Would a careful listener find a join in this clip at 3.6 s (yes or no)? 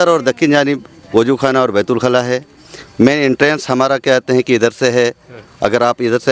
no